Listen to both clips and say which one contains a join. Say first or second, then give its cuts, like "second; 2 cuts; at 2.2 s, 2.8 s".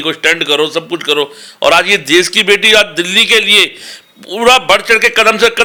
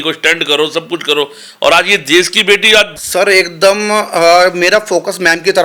second; 1 cut; at 3.0 s